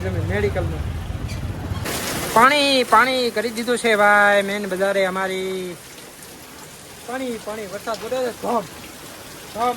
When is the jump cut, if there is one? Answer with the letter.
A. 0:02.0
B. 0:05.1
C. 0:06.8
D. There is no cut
A